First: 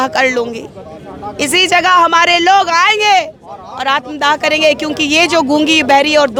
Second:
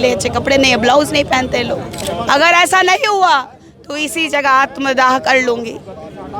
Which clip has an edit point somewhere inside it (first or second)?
second